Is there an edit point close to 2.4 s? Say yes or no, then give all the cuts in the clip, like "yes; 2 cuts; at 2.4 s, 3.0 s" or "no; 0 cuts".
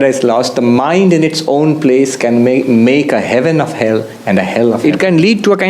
no; 1 cut; at 4.8 s